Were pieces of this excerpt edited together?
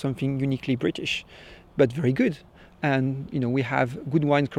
yes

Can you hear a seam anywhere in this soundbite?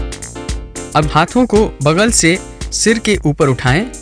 yes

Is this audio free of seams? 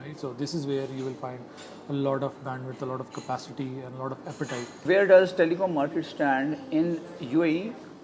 no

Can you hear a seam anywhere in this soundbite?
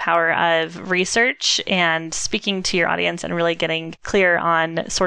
yes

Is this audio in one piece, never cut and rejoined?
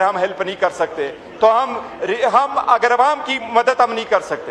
yes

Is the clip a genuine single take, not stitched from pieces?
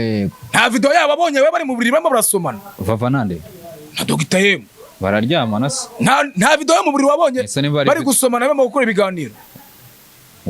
yes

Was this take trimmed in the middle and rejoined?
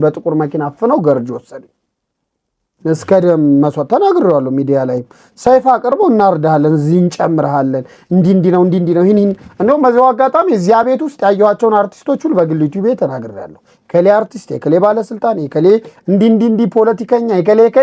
no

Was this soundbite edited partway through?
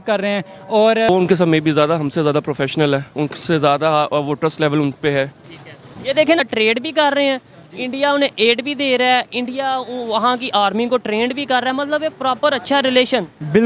yes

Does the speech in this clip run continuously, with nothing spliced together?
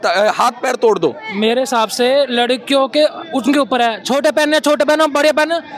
no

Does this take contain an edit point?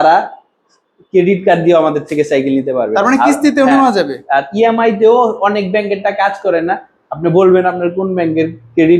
no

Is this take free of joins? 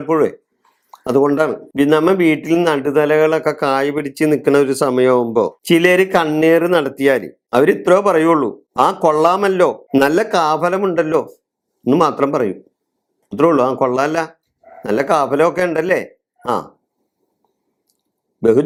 yes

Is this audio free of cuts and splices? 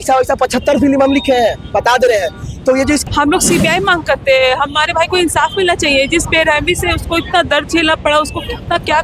no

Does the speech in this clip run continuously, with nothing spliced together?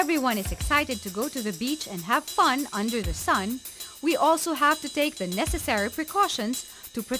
yes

